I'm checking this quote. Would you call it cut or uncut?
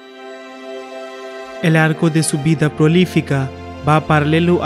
cut